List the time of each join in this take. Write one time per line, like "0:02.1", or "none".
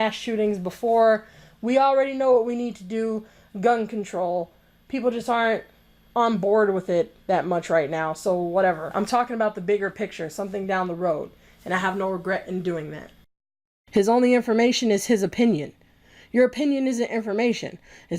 0:08.9
0:13.5